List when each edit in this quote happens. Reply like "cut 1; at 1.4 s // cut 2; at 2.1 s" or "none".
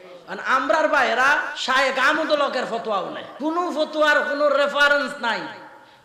cut 1; at 1.5 s // cut 2; at 3.2 s